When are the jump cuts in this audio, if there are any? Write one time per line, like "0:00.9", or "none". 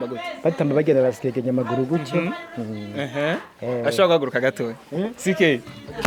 none

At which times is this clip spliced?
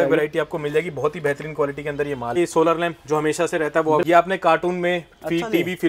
0:02.4
0:04.0

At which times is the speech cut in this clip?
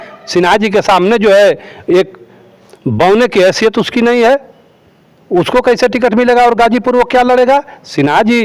none

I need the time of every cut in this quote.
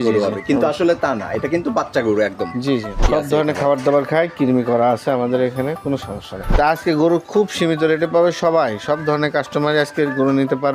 0:03.0
0:06.5

